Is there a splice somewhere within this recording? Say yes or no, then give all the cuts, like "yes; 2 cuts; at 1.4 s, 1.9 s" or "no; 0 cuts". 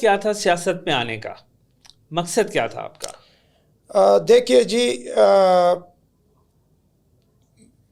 no; 0 cuts